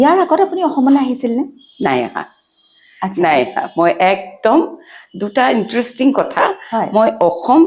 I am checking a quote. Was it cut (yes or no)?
no